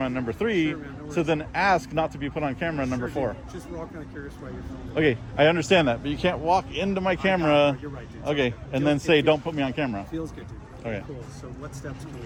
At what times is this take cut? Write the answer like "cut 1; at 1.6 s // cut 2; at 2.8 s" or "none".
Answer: none

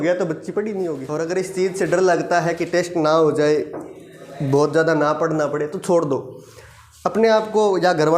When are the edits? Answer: cut 1; at 1.0 s

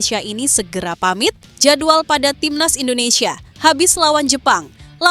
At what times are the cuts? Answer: cut 1; at 1.5 s

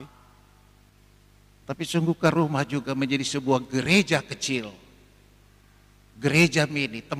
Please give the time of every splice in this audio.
cut 1; at 0.9 s

